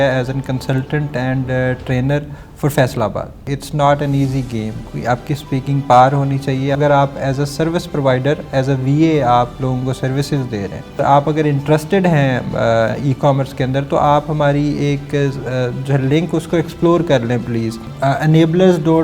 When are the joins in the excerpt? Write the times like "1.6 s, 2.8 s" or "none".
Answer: 3.5 s, 4.9 s, 6.8 s, 11.0 s, 17.9 s